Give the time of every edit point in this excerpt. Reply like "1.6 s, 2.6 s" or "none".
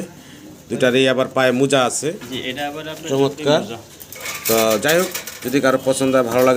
none